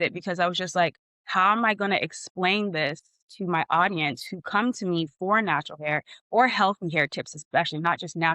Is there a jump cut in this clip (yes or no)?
no